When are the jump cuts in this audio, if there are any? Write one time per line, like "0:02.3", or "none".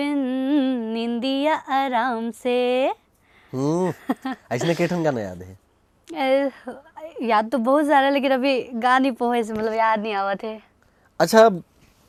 none